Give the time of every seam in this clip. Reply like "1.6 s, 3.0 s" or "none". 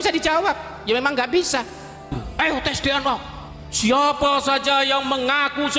2.1 s